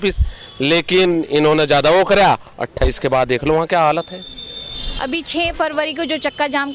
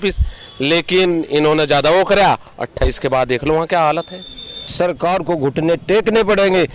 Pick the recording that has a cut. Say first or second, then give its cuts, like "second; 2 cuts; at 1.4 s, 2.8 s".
second; 1 cut; at 4.7 s